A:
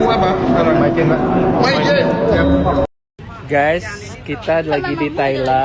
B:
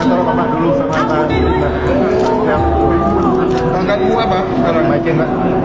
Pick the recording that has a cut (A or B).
A